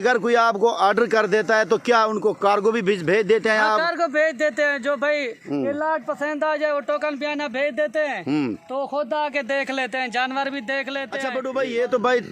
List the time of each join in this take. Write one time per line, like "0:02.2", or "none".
0:11.3